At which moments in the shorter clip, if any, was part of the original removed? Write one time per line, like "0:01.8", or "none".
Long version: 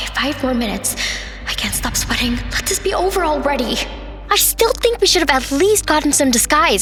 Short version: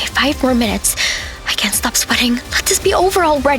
none